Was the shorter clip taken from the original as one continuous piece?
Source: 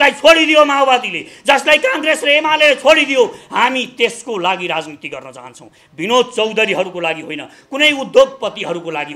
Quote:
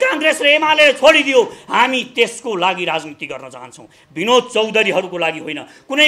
yes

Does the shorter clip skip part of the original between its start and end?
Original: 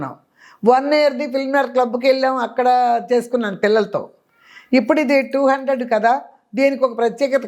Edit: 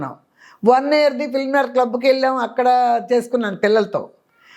no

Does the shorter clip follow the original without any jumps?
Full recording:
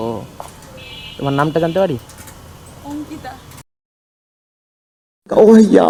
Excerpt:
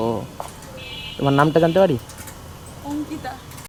yes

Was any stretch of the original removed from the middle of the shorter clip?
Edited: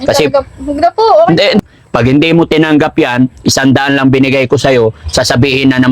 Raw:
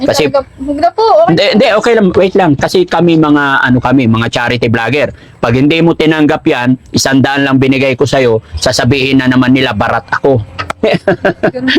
yes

